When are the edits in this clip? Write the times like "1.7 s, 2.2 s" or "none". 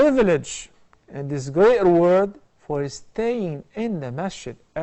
none